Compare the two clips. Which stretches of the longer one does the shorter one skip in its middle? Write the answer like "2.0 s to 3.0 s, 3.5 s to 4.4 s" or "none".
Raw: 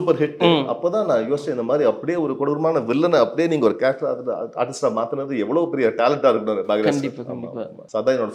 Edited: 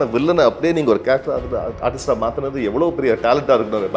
none